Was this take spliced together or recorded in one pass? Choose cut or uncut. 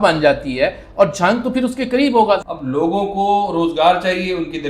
cut